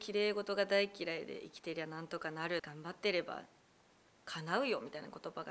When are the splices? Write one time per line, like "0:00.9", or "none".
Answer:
0:02.7